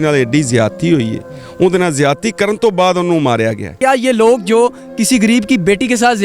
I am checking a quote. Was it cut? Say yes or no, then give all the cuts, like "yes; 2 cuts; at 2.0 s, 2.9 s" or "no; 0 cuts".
yes; 1 cut; at 3.7 s